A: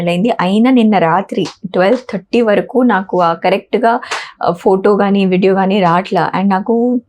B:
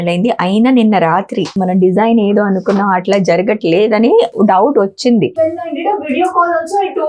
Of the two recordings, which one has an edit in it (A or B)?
B